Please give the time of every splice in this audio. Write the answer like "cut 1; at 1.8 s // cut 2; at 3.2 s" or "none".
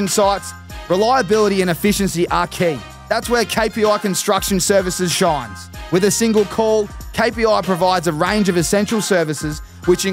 none

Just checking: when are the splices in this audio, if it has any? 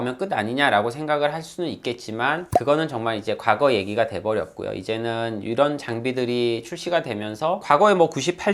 none

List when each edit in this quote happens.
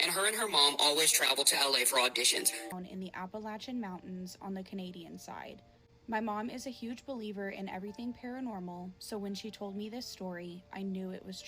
cut 1; at 2.7 s

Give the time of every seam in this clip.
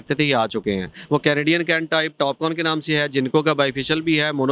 cut 1; at 0.9 s

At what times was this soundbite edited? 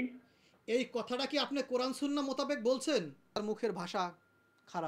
cut 1; at 3.4 s

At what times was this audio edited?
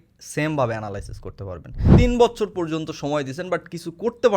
cut 1; at 1.9 s

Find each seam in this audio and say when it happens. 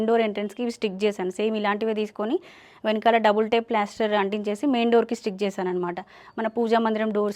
none

